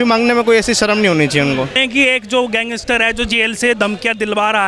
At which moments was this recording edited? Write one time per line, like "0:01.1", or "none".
0:01.8